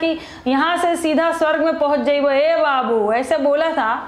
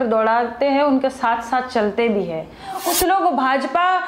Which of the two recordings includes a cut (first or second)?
second